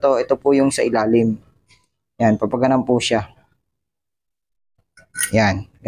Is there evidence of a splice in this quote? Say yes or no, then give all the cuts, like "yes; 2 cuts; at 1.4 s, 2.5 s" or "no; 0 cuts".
no; 0 cuts